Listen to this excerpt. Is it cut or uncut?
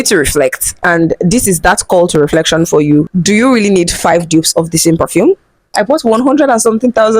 cut